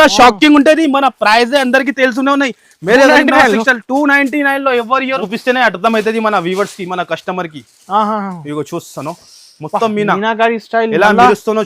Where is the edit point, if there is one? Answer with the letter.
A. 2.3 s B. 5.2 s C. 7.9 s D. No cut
B